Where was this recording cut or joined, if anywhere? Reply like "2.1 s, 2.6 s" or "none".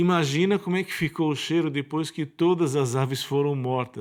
none